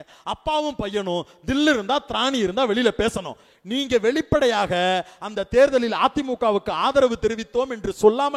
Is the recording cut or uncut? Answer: uncut